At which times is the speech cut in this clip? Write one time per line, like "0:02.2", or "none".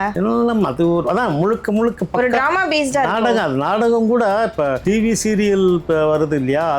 0:04.8

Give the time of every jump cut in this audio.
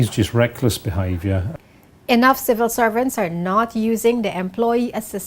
0:01.5

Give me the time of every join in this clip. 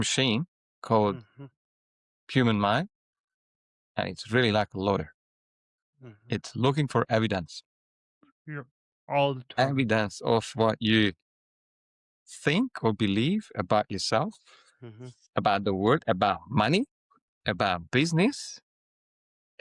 none

